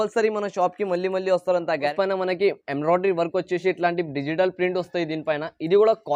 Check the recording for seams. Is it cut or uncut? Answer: uncut